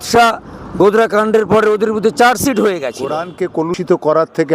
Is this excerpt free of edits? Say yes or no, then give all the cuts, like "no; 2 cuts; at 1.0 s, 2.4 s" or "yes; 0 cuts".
no; 1 cut; at 3.2 s